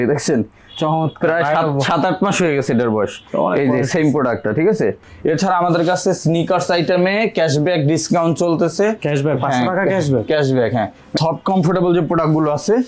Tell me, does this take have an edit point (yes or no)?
yes